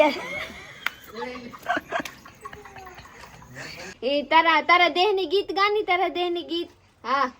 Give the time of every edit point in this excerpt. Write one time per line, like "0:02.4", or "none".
0:03.9

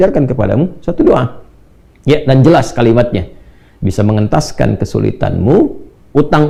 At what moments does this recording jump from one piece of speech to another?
none

